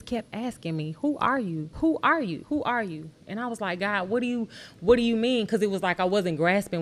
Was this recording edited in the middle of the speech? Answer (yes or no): yes